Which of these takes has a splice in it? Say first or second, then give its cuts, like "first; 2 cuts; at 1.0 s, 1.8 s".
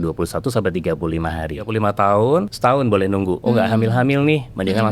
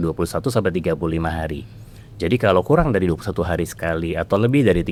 first; 3 cuts; at 1.7 s, 2.5 s, 3.4 s